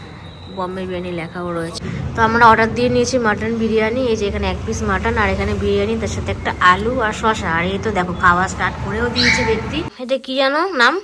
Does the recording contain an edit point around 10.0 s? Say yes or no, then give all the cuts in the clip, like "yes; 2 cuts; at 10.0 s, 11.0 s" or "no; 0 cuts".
yes; 2 cuts; at 1.8 s, 10.0 s